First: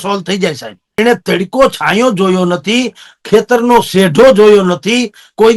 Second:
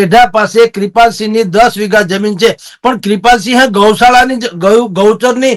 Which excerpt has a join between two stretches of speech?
first; 1 cut; at 1.0 s

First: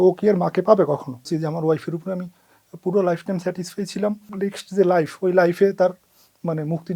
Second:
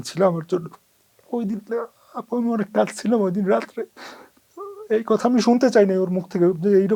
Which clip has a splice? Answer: first; 2 cuts; at 1.3 s, 4.3 s

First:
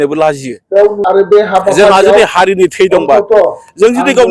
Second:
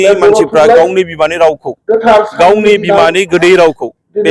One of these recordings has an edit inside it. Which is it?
first; 1 cut; at 1.0 s

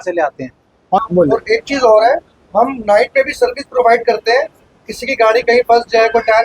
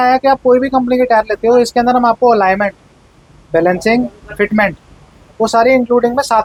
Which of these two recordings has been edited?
first; 1 cut; at 1.0 s

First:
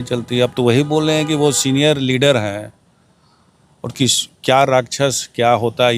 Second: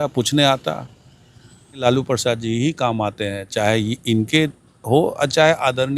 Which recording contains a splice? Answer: second; 1 cut; at 1.8 s

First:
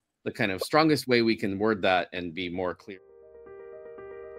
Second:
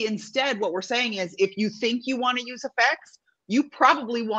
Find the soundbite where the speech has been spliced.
first; 1 cut; at 2.8 s

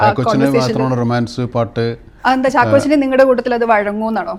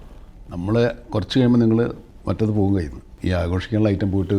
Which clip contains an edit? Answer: second; 1 cut; at 3.1 s

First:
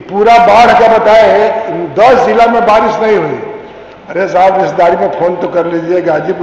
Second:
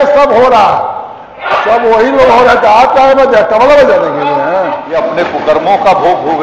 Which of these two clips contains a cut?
second; 1 cut; at 4.8 s

